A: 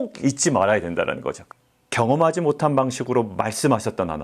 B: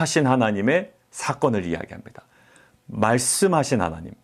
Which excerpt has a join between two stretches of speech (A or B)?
A